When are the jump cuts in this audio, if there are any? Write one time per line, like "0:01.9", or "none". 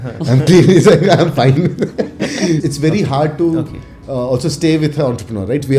0:02.6